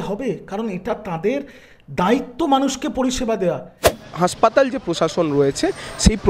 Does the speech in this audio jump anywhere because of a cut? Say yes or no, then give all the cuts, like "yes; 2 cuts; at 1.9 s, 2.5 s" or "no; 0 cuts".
yes; 1 cut; at 3.9 s